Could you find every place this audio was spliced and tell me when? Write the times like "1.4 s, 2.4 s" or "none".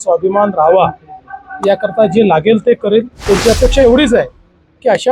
3.1 s